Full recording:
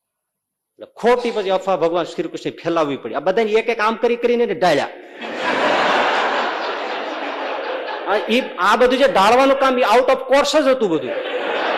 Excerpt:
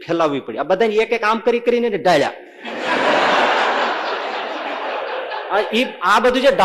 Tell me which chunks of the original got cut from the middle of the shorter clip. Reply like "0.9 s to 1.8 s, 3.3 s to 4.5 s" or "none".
none

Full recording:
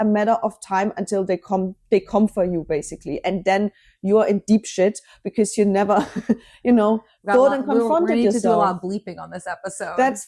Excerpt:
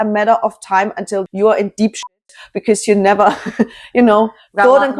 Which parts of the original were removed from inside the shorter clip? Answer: 1.3 s to 4.0 s

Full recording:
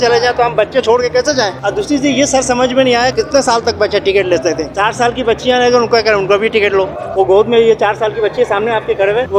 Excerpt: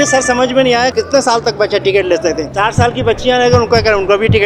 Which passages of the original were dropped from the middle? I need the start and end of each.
none

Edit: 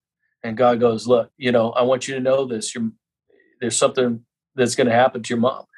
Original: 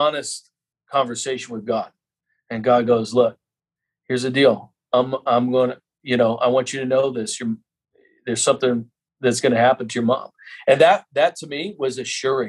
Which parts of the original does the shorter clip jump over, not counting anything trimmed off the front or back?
3.4 s to 6.0 s

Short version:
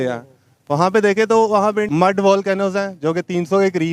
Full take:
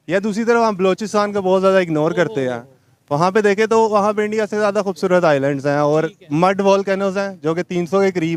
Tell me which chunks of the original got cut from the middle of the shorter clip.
4.3 s to 6.3 s

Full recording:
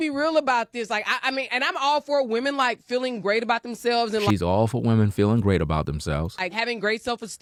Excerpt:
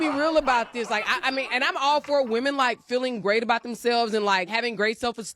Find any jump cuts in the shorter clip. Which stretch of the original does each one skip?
4.3 s to 6.3 s

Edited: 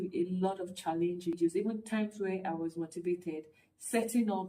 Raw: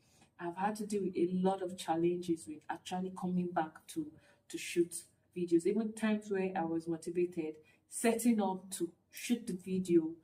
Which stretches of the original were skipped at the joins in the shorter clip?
2.4 s to 5.5 s

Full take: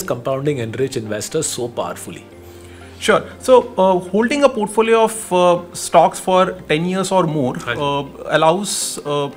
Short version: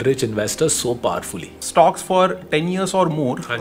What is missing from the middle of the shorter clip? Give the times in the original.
2.3 s to 5.7 s

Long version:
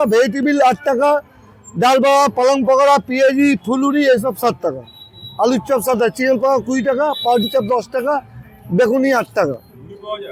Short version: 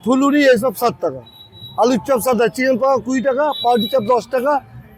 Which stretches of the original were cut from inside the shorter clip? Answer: none

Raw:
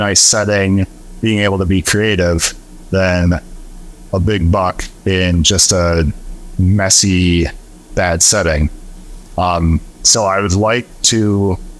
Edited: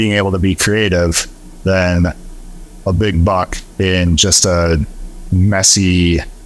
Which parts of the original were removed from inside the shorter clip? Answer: none

